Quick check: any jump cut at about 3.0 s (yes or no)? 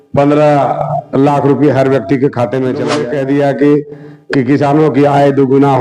yes